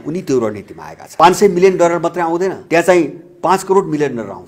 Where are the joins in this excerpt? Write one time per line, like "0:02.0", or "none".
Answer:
0:01.1
0:02.6

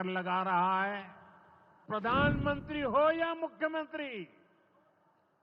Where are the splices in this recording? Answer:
0:01.8

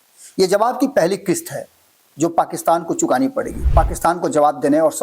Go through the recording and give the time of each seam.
0:03.6

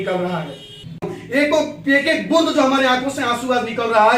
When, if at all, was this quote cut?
0:01.0

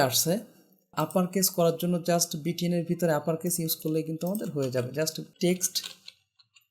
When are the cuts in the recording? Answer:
0:00.9
0:05.2

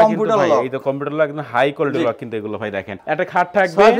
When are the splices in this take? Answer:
0:03.0

